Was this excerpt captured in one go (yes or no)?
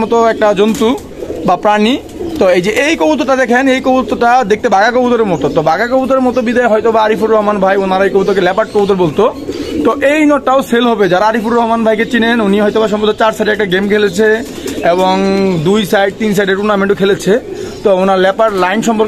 yes